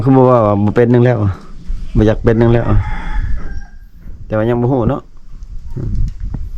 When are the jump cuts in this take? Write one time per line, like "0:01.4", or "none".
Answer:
none

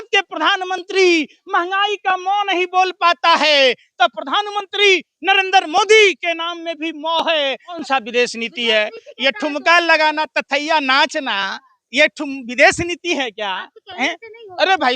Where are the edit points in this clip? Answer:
0:07.8

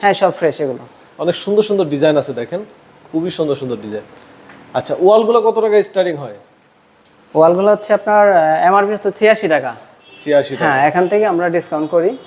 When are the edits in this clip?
none

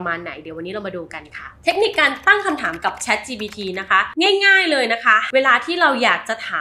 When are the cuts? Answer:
0:05.3

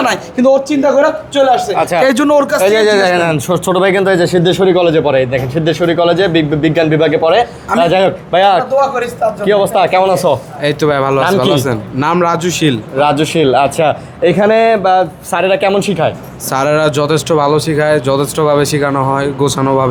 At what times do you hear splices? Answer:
none

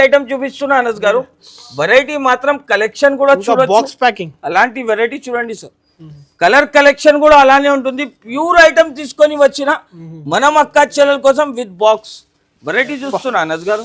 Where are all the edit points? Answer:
none

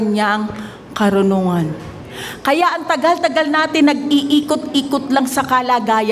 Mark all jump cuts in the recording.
none

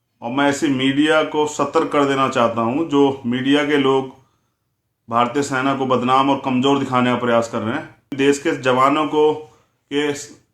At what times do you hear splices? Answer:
0:08.1

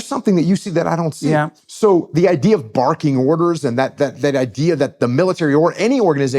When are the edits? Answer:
0:01.6

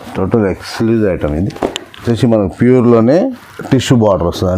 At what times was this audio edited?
0:02.0

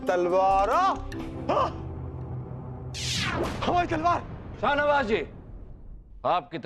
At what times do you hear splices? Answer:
0:04.5

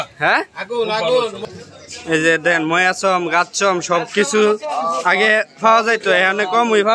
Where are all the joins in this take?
0:01.4

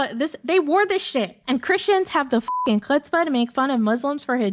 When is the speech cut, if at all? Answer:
0:01.4

